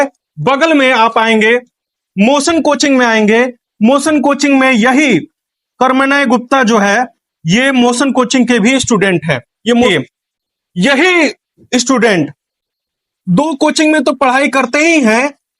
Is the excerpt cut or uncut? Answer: cut